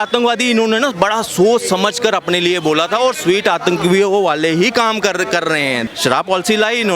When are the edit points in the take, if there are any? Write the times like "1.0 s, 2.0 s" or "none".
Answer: 5.9 s